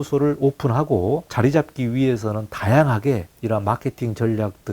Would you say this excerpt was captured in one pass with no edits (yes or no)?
no